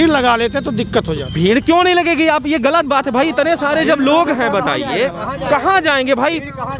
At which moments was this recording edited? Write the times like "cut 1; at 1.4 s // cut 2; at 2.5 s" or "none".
none